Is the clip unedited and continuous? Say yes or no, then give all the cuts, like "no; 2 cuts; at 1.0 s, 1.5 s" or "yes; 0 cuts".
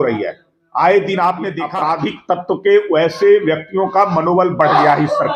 no; 1 cut; at 1.6 s